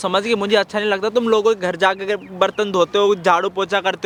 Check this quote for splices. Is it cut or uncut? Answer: uncut